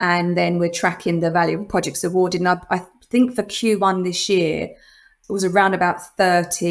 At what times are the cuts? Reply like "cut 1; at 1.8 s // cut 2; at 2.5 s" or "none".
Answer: cut 1; at 5.1 s